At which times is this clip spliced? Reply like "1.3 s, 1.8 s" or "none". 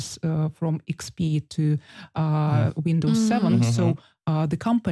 none

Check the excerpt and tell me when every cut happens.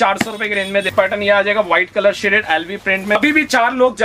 0.9 s, 3.2 s

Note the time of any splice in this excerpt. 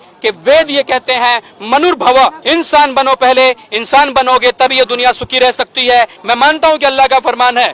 2.4 s, 6.2 s

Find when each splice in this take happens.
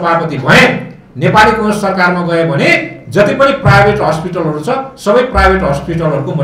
none

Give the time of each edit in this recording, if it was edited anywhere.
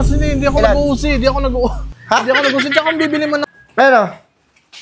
3.4 s

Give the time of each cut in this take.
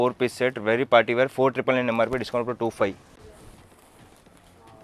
3.2 s

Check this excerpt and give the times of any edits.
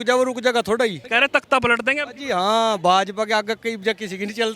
1.0 s

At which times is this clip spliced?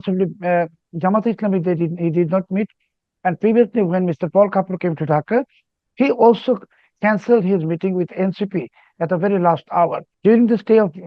10.1 s

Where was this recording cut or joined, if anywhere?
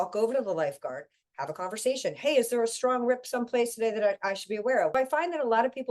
4.9 s

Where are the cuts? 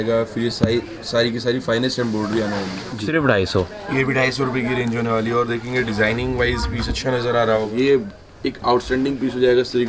3.0 s, 7.7 s

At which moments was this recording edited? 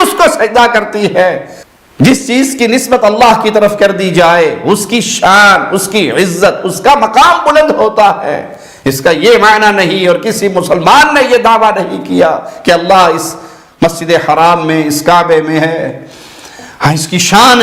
1.6 s

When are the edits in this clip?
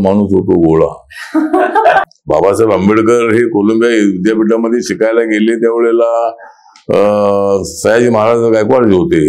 2.1 s

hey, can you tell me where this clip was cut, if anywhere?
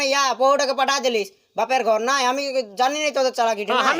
none

